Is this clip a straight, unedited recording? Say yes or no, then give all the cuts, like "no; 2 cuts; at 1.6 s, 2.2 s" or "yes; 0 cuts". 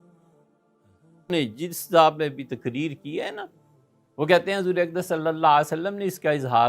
no; 1 cut; at 1.0 s